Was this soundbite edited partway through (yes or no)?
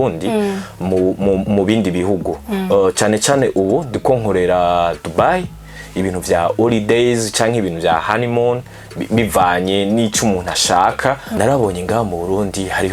yes